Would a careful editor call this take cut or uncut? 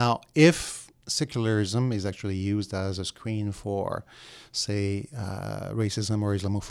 uncut